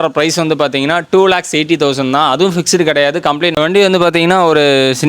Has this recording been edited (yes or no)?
yes